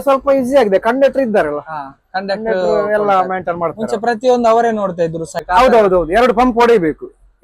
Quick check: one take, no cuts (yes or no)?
no